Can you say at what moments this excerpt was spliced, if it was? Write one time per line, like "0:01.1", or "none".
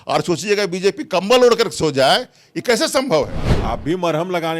0:03.5